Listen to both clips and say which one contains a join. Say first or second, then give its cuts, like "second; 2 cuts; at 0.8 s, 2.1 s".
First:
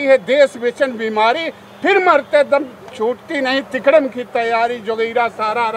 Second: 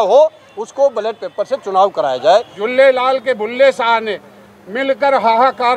second; 1 cut; at 2.6 s